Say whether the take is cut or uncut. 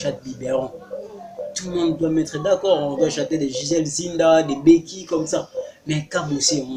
uncut